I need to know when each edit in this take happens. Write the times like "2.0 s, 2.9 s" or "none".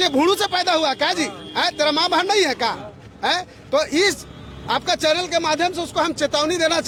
none